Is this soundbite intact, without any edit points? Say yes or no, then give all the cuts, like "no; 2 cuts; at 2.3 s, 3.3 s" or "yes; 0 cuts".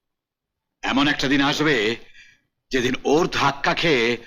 yes; 0 cuts